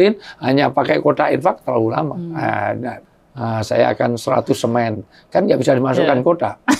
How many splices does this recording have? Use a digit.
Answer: 1